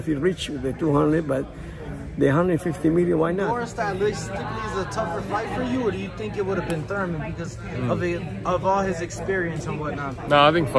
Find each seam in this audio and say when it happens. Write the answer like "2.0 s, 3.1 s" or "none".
3.6 s